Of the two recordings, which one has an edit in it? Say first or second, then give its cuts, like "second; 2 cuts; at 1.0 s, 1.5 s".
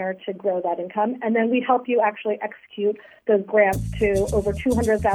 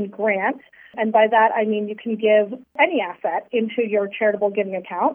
second; 2 cuts; at 0.9 s, 2.7 s